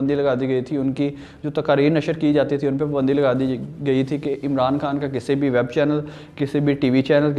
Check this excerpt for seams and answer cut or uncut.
uncut